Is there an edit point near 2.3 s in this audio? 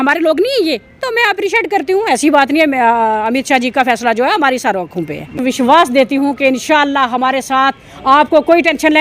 no; 2 cuts; at 1.0 s, 5.4 s

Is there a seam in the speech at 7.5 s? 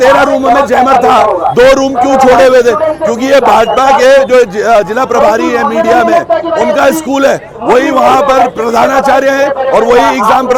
no; 0 cuts

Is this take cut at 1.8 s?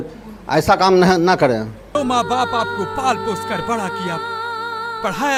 no; 0 cuts

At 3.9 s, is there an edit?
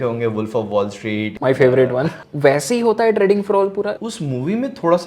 yes; 3 cuts; at 1.3 s, 2.2 s, 3.9 s

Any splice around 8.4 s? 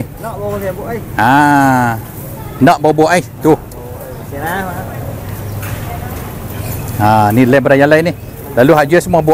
no; 0 cuts

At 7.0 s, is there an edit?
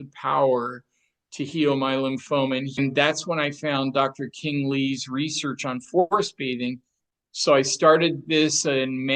yes; 2 cuts; at 2.8 s, 7.0 s

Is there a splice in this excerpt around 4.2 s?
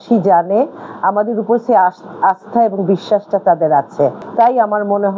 yes; 1 cut; at 4.2 s

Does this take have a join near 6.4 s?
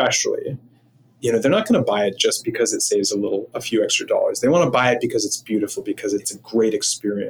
yes; 1 cut; at 6.4 s

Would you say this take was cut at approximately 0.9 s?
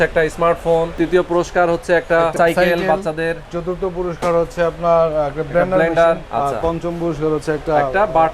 yes; 3 cuts; at 0.9 s, 2.3 s, 6.2 s

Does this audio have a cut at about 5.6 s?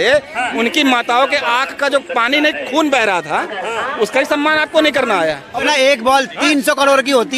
yes; 1 cut; at 5.6 s

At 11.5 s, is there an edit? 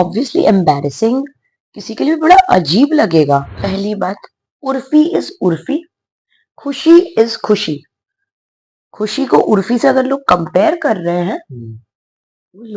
no; 1 cut; at 3.6 s

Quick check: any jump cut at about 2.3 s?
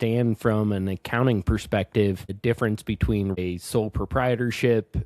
yes; 2 cuts; at 2.3 s, 3.4 s

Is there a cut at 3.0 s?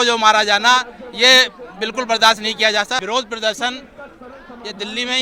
yes; 1 cut; at 3.0 s

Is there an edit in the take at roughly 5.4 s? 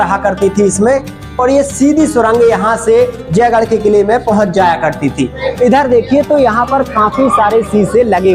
yes; 1 cut; at 5.4 s

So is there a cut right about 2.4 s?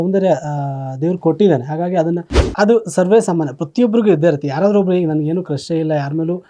yes; 1 cut; at 2.4 s

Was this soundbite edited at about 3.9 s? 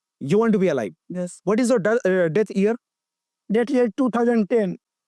no; 0 cuts

